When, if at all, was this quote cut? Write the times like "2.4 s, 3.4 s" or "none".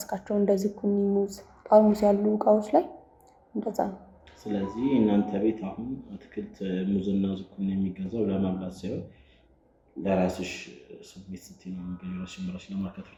none